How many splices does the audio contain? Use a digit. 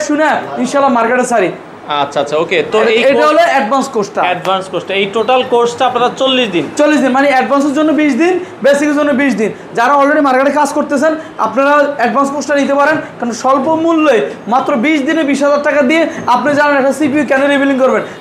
0